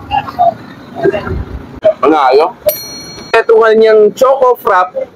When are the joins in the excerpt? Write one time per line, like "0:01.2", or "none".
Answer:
0:01.8
0:03.3